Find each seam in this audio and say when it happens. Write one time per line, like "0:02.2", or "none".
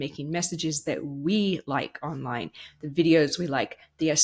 none